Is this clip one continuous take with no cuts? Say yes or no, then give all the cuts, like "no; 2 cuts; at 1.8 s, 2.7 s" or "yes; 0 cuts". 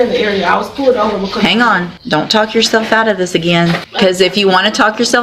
no; 2 cuts; at 1.9 s, 3.9 s